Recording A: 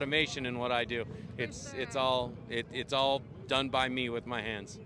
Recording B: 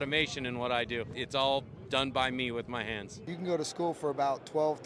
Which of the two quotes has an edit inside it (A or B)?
B